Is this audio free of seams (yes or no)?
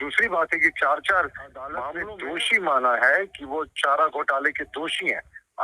no